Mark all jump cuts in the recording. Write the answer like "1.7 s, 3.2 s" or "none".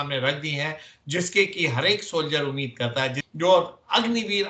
3.2 s